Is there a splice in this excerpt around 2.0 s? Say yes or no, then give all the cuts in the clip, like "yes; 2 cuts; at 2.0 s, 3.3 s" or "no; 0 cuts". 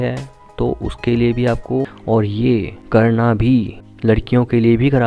yes; 1 cut; at 2.0 s